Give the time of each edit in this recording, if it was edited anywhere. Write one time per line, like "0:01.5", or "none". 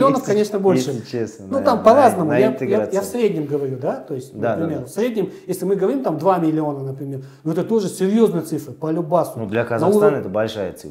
none